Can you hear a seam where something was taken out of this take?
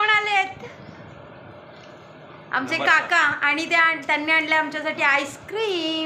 no; 0 cuts

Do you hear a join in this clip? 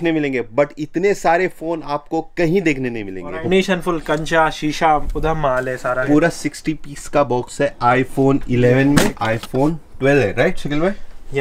yes; 3 cuts; at 3.5 s, 6.0 s, 9.2 s

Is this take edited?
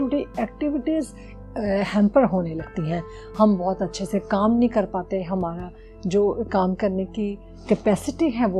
no; 0 cuts

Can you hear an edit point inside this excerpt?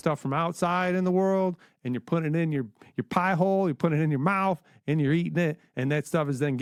no; 0 cuts

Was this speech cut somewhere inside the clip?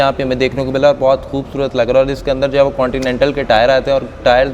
no; 0 cuts

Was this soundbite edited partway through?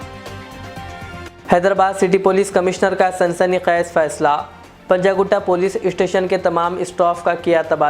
yes; 1 cut; at 1.2 s

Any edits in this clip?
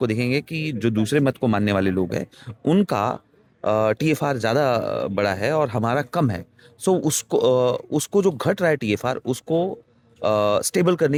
no; 0 cuts

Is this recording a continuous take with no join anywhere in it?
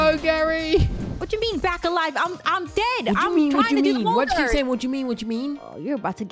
no; 1 cut; at 1.0 s

